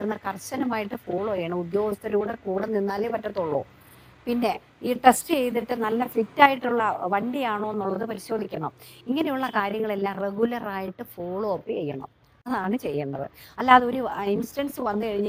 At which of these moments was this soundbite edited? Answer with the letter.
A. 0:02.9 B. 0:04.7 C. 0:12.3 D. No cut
D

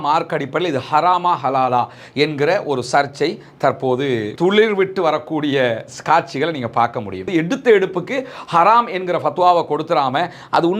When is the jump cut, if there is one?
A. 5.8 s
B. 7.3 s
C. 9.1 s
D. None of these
B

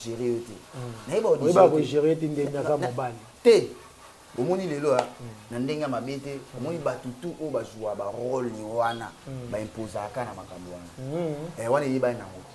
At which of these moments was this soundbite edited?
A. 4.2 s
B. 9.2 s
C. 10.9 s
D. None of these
A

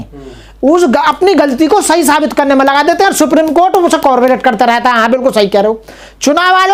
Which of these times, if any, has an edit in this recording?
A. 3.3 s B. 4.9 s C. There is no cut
C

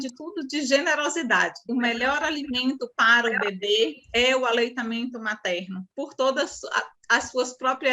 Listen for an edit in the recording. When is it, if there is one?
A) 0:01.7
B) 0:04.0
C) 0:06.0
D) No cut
A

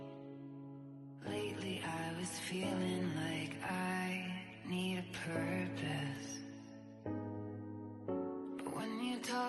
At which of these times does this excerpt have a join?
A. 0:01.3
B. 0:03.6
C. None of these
A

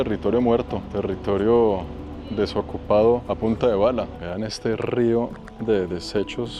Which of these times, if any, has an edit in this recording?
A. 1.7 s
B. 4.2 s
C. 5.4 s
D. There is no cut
B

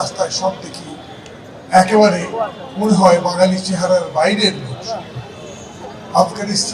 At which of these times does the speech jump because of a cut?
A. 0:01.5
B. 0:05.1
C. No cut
C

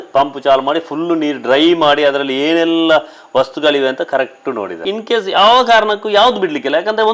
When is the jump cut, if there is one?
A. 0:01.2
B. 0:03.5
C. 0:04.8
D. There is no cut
C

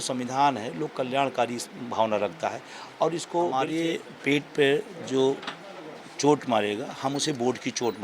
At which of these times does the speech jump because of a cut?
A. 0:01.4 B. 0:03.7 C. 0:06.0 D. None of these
B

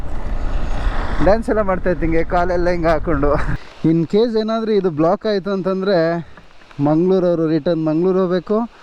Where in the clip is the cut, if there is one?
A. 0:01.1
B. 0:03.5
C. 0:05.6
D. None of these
B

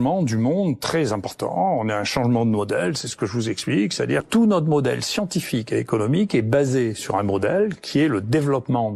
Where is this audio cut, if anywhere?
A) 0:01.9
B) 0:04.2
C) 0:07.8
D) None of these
B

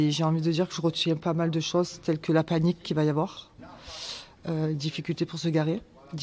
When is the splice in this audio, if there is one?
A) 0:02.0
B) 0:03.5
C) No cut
C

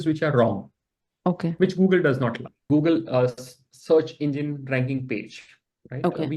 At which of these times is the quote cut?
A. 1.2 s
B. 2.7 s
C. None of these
B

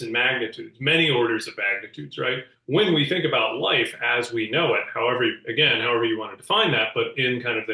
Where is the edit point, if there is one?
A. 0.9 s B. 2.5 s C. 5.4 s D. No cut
B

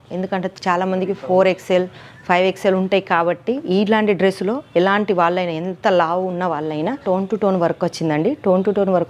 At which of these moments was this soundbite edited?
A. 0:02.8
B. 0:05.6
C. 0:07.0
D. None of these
C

